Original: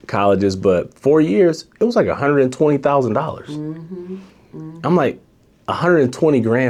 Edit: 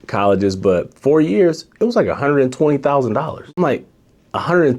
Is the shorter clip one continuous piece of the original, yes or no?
no